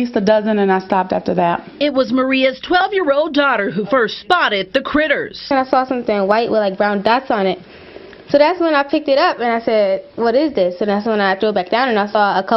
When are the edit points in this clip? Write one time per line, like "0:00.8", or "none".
0:11.4